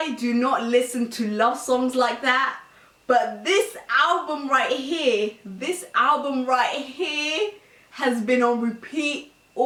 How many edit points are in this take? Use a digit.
0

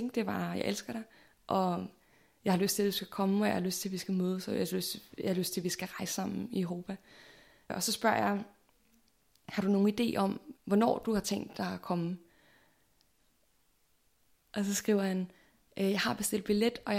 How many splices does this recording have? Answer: 2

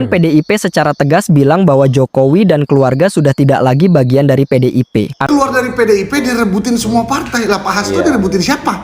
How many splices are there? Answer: 1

